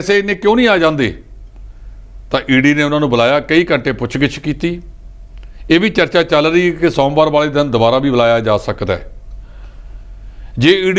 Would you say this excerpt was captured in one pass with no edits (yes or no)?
yes